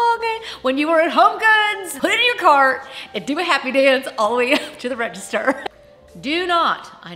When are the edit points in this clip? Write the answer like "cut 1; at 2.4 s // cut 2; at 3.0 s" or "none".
cut 1; at 1.8 s // cut 2; at 5.6 s